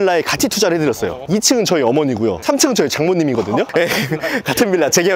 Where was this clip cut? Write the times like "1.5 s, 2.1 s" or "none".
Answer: 1.2 s, 2.4 s, 3.7 s